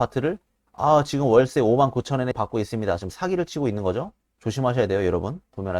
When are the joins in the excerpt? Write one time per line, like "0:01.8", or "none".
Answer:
0:02.3
0:04.4